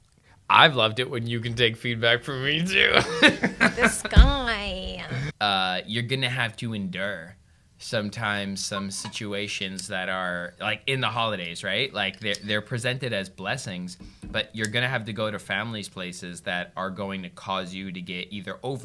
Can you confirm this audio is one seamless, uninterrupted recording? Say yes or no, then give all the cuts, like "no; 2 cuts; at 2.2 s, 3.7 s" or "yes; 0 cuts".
no; 1 cut; at 5.2 s